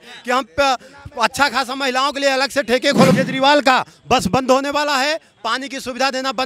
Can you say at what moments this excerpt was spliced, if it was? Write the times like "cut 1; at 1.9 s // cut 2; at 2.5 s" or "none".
cut 1; at 3.1 s